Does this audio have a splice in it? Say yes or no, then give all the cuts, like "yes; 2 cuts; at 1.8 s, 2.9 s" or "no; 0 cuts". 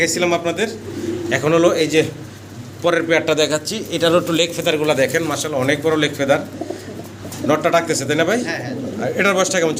no; 0 cuts